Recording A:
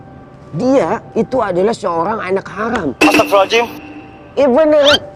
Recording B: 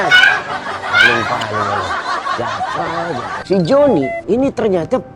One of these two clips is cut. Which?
B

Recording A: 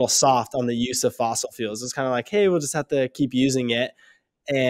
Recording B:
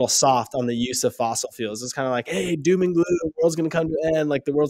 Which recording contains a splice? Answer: B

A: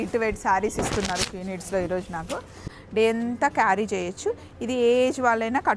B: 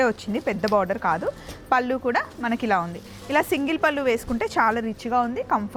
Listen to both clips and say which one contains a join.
A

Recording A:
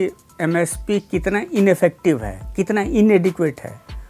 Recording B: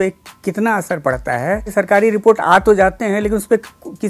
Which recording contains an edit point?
B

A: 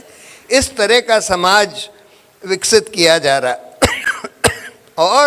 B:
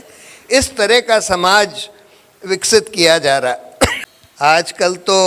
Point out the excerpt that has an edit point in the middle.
B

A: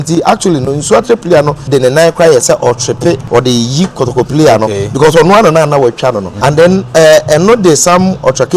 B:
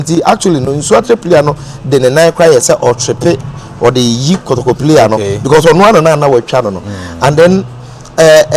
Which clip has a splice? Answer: A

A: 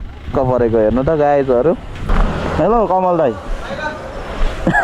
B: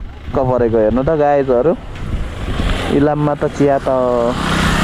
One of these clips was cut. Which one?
A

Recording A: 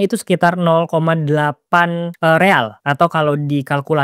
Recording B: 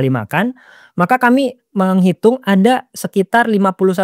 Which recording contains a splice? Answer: A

